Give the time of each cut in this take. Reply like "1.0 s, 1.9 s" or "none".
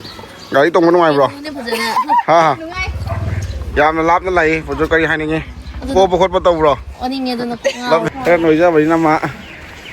8.1 s